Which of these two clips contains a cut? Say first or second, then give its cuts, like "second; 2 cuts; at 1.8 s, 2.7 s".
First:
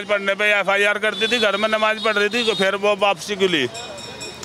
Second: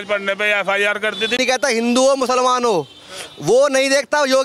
second; 1 cut; at 1.4 s